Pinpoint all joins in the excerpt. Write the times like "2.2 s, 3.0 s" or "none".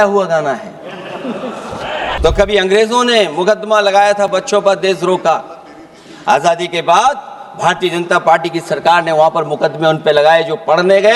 2.2 s